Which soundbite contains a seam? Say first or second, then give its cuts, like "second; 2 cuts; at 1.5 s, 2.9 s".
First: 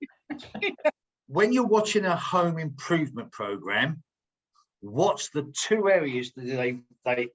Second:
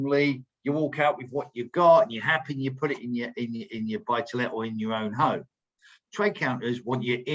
first; 1 cut; at 1.0 s